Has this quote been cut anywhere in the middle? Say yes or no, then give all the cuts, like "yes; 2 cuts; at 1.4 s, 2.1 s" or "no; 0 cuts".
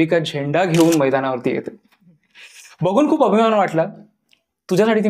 no; 0 cuts